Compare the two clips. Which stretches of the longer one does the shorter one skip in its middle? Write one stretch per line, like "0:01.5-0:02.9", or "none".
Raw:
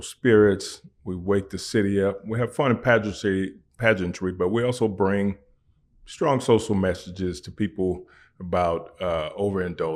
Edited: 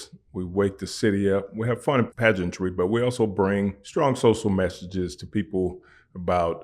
0:02.8-0:03.7
0:05.4-0:06.1

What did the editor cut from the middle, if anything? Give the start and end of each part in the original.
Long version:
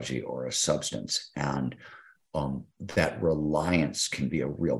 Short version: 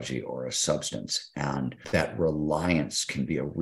0:01.8-0:02.8

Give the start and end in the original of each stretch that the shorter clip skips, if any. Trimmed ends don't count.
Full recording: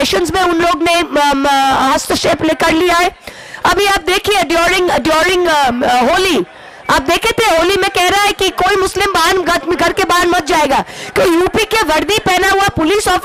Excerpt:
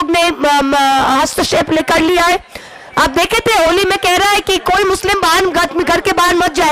0:03.4-0:06.6

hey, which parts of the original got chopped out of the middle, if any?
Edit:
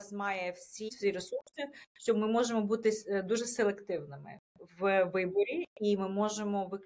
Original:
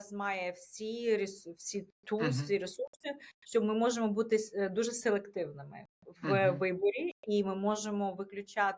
0:00.9-0:02.4

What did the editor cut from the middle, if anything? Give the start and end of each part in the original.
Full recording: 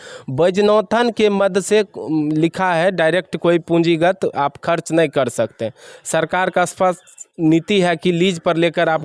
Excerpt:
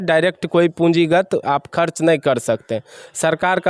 none

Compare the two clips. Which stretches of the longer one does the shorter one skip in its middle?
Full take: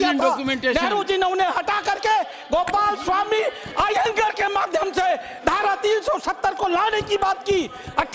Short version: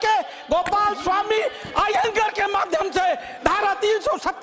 none

